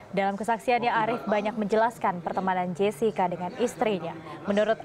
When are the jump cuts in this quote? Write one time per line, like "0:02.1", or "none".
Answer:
0:01.7